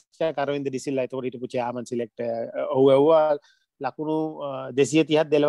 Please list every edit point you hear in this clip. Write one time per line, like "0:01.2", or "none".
none